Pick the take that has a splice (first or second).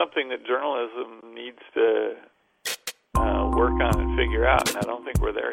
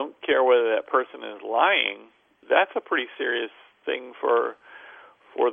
second